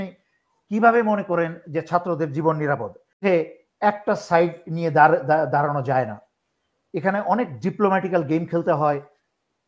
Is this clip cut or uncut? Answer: cut